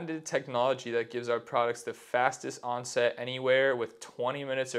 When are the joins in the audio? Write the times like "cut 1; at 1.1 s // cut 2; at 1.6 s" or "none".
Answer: none